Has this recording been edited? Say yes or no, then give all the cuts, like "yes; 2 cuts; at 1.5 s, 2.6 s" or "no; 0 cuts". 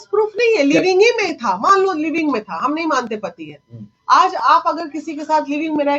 no; 0 cuts